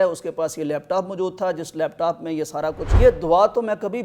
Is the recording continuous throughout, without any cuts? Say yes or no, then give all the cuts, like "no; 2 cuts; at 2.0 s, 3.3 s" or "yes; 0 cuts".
no; 1 cut; at 2.9 s